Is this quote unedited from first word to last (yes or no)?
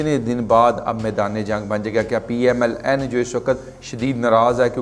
yes